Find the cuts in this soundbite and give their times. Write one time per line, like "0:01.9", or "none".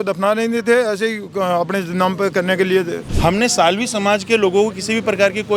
0:03.0